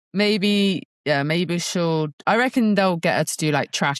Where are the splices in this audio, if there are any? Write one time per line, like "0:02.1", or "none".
0:00.9